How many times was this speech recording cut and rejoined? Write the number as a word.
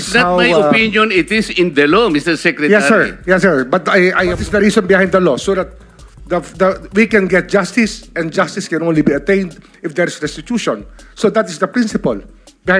one